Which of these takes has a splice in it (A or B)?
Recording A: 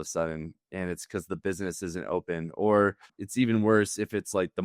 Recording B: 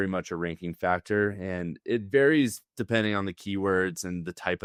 A